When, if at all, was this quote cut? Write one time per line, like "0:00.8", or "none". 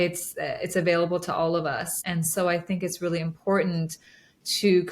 0:01.9